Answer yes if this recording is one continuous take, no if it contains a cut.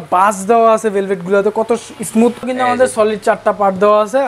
no